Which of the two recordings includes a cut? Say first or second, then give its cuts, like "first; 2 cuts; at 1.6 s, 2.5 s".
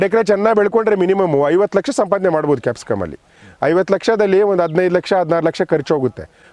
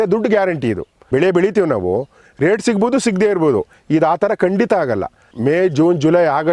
second; 2 cuts; at 0.9 s, 5.2 s